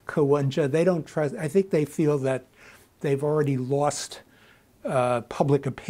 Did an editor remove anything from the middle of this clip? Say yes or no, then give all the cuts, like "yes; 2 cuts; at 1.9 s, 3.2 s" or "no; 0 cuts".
no; 0 cuts